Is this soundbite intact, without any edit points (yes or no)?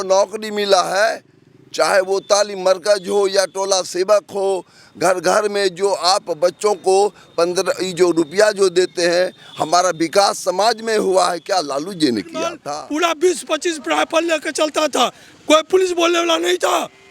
no